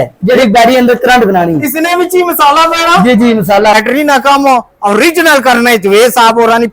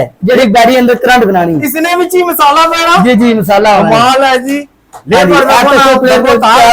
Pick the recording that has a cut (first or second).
first